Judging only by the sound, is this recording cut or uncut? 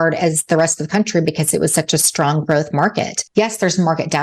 cut